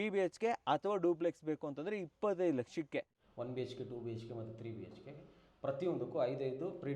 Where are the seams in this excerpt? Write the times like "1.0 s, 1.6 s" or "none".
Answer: 3.2 s